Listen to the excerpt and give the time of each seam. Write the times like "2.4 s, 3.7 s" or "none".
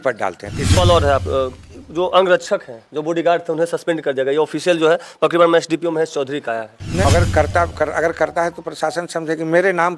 0.8 s, 7.1 s